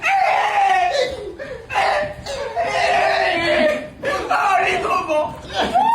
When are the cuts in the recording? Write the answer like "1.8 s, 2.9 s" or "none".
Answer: none